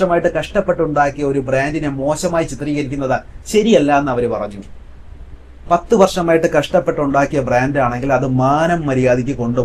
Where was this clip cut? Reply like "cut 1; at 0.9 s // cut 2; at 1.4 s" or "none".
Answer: none

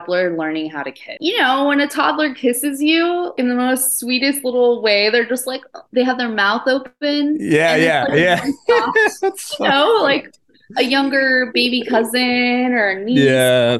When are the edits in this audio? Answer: cut 1; at 1.1 s // cut 2; at 3.4 s

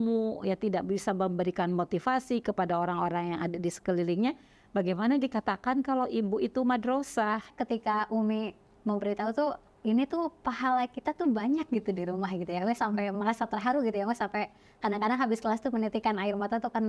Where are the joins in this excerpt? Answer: cut 1; at 7.5 s // cut 2; at 9.7 s

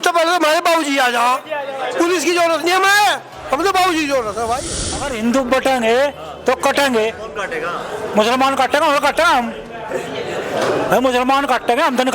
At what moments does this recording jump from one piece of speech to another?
cut 1; at 5.0 s

